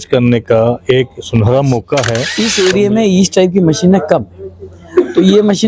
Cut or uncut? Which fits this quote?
cut